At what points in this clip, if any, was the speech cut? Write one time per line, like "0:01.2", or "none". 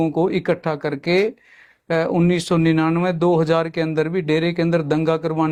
none